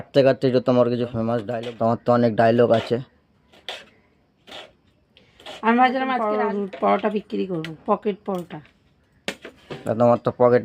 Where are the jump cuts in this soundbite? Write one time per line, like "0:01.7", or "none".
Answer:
0:01.5
0:06.2